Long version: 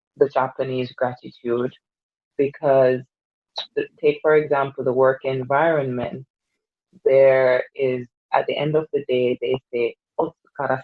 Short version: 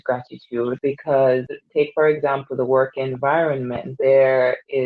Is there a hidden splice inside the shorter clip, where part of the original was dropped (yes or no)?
yes